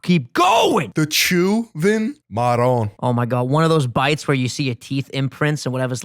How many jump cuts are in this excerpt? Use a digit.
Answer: 3